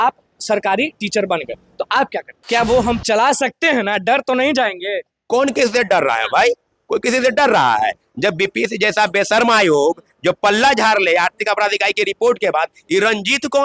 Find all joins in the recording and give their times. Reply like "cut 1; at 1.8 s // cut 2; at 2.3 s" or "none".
cut 1; at 2.3 s